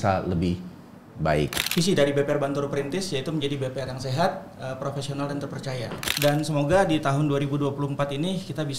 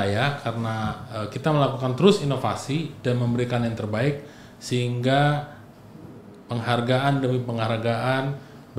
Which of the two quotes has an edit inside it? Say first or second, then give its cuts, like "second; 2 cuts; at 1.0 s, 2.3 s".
first; 2 cuts; at 1.6 s, 6.0 s